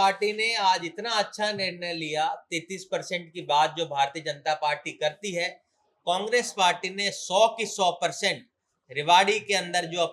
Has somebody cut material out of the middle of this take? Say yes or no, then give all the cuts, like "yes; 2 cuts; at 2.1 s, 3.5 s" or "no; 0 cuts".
no; 0 cuts